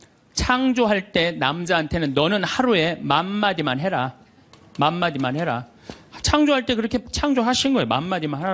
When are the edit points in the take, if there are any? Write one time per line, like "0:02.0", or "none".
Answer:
none